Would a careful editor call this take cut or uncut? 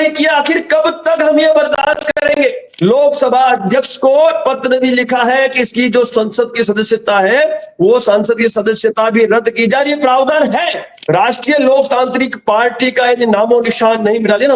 cut